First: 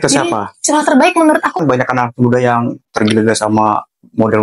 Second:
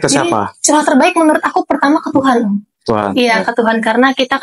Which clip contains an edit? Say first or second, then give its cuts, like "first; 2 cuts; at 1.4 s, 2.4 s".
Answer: first; 1 cut; at 1.6 s